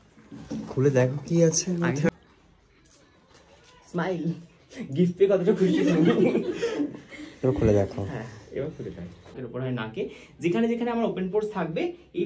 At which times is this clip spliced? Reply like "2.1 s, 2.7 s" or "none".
2.1 s, 9.2 s